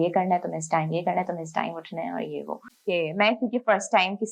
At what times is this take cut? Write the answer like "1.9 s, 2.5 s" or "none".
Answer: 2.6 s